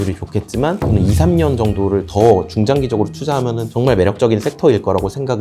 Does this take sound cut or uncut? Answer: cut